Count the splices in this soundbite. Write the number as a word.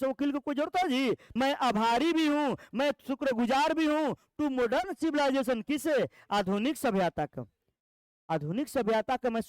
one